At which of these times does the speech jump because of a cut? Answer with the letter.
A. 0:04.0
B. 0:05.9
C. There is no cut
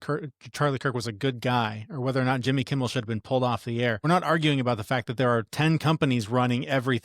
A